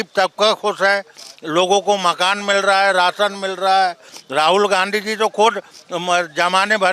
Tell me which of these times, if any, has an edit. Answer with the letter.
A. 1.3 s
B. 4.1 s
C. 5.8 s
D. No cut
B